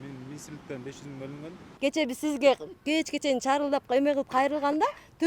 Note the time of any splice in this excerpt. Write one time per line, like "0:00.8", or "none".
0:01.7